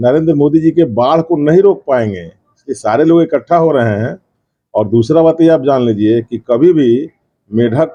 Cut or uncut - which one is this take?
uncut